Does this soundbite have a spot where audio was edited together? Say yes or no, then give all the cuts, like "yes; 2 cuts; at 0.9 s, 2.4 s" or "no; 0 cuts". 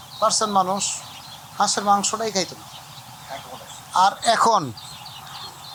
no; 0 cuts